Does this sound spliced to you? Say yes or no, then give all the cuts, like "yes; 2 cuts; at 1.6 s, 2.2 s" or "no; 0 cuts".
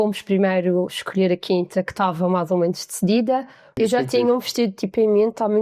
yes; 1 cut; at 3.6 s